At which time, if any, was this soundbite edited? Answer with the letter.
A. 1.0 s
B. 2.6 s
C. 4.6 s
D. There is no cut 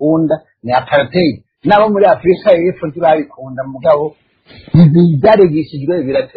D